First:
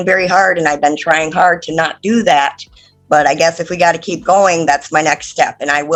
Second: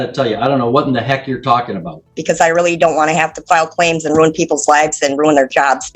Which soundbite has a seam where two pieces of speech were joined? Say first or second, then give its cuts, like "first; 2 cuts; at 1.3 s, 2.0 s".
second; 1 cut; at 2.1 s